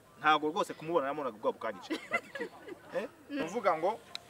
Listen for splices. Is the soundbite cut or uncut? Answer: cut